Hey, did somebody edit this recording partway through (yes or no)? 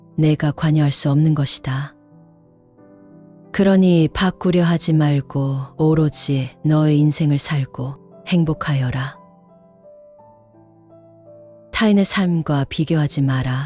no